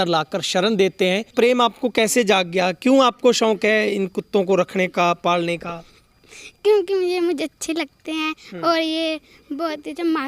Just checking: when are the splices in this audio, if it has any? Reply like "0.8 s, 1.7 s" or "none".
1.3 s